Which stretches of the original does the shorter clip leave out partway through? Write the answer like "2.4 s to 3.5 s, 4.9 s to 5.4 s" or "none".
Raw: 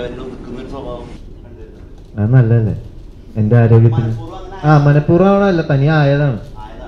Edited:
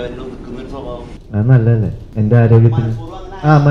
1.2 s to 2.0 s, 2.8 s to 3.2 s